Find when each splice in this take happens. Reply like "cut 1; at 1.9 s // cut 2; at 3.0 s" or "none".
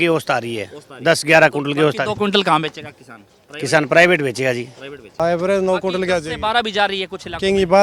cut 1; at 5.2 s